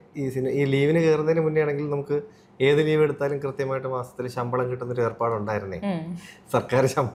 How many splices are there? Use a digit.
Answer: 0